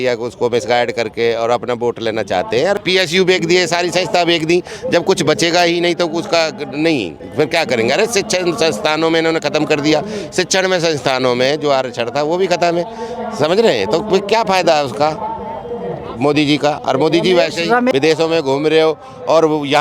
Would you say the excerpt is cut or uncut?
cut